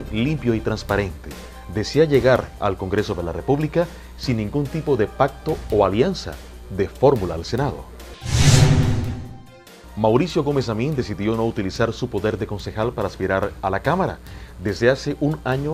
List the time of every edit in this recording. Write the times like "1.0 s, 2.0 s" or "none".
12.1 s